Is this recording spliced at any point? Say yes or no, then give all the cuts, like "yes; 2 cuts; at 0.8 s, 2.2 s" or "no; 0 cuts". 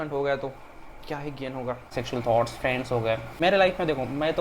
yes; 2 cuts; at 1.9 s, 3.4 s